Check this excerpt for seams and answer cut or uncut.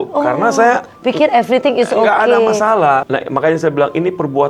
cut